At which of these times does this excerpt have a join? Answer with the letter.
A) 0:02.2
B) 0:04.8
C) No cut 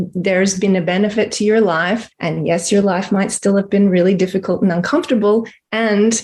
A